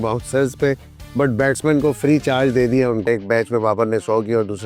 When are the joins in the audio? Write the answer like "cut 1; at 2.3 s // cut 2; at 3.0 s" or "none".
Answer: cut 1; at 3.1 s